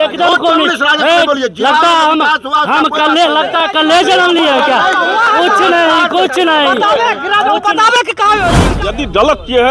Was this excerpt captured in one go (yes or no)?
no